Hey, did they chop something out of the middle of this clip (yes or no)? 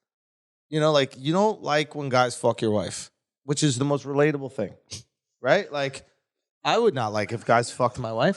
no